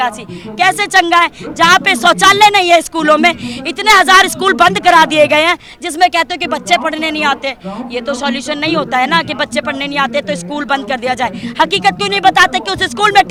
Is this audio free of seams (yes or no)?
yes